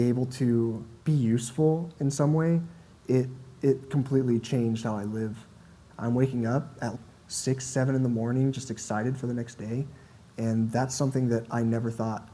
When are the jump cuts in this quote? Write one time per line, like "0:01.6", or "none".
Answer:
0:00.9
0:05.8